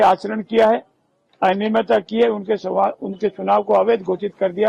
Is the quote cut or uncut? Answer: uncut